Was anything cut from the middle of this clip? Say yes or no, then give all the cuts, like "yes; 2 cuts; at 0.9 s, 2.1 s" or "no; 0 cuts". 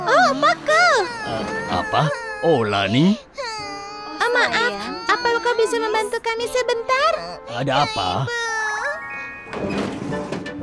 no; 0 cuts